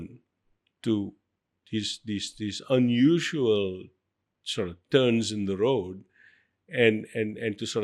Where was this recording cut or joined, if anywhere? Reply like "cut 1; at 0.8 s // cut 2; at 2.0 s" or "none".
none